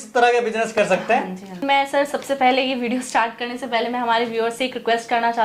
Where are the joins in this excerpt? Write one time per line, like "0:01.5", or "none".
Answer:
0:01.6